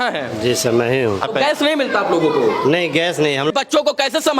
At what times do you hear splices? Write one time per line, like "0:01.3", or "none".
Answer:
0:01.2
0:03.5